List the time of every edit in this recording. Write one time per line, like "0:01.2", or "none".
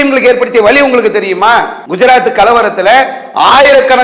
0:01.8